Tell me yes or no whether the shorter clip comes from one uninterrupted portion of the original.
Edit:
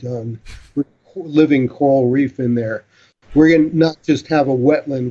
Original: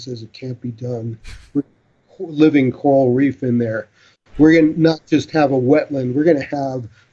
no